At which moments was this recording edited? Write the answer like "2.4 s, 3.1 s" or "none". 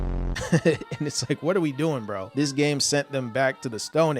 2.3 s

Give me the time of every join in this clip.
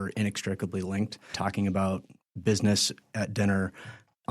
1.3 s

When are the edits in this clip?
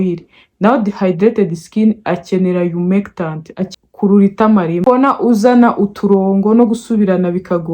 3.6 s

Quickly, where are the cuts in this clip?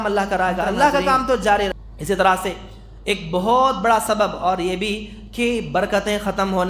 1.7 s

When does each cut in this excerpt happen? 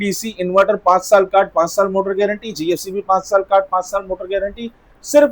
none

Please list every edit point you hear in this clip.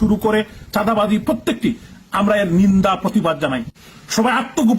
3.7 s

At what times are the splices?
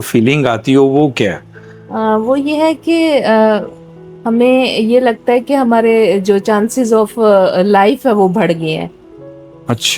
none

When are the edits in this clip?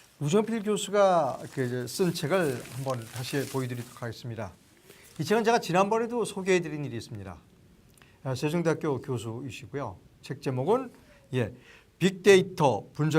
9.8 s

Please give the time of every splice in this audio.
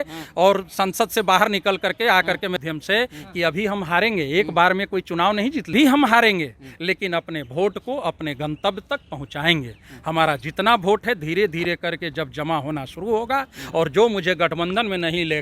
2.6 s, 5.7 s

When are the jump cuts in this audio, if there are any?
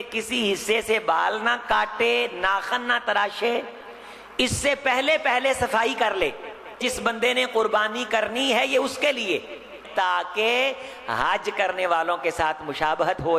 6.8 s, 9.8 s

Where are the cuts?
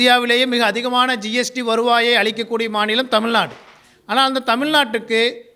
none

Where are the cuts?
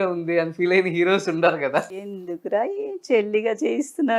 1.9 s

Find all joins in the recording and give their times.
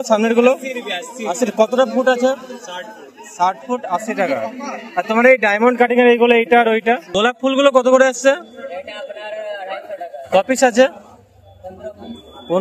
7.1 s

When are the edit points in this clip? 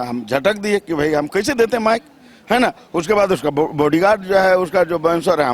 none

